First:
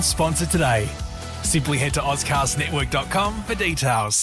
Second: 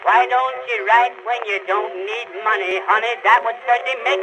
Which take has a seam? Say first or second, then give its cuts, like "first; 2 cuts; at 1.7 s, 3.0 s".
second; 1 cut; at 2.7 s